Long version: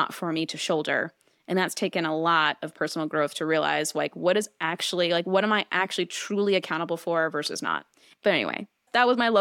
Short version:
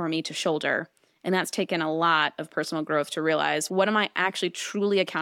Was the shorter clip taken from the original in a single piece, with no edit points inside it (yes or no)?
no